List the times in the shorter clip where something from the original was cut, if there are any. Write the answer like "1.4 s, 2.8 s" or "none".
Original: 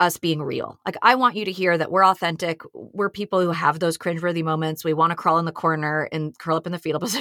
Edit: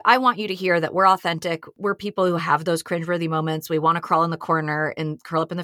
1.7 s